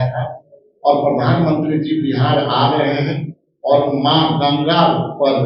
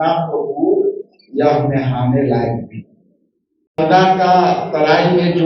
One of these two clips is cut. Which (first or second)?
second